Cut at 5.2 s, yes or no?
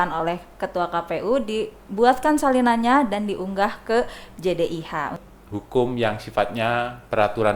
yes